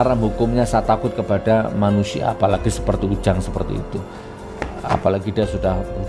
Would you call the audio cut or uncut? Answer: uncut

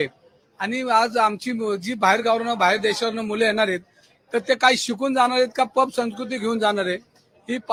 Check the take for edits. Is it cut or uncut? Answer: uncut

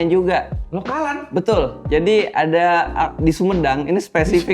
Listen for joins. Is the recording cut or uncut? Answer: cut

